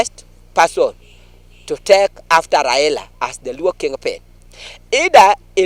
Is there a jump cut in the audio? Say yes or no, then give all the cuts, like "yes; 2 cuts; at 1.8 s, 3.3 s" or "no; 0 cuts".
no; 0 cuts